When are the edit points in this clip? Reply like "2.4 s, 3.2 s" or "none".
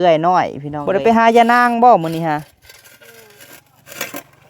0.9 s